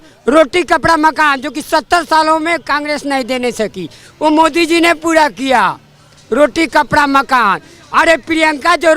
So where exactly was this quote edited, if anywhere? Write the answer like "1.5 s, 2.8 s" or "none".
none